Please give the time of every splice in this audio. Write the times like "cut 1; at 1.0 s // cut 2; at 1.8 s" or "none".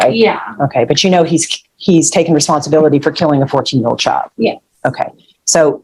none